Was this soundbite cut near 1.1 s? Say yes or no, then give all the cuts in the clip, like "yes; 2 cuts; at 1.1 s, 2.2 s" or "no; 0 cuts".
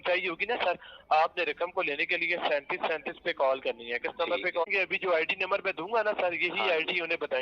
no; 1 cut; at 4.6 s